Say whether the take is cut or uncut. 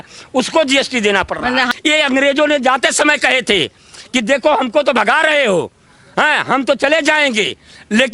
cut